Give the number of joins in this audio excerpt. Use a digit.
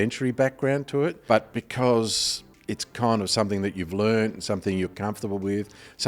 1